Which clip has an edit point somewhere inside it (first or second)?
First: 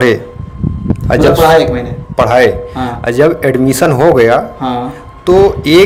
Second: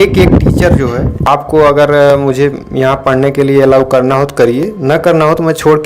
second